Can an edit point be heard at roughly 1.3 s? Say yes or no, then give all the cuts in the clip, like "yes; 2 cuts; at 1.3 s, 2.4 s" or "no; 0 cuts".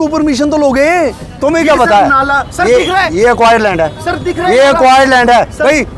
yes; 1 cut; at 1.3 s